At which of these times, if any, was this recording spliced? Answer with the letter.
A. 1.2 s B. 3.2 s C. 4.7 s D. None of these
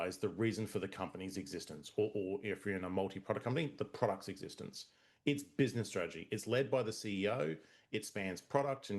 B